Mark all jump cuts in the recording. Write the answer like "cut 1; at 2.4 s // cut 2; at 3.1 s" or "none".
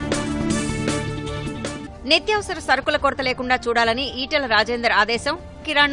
cut 1; at 1.9 s